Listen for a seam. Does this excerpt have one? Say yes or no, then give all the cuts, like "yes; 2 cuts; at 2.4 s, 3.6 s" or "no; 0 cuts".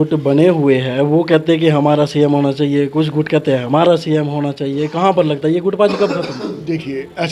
no; 0 cuts